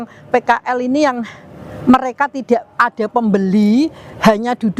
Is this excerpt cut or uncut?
uncut